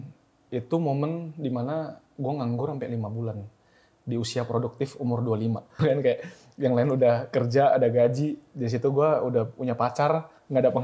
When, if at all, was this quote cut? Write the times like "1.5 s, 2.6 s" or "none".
5.8 s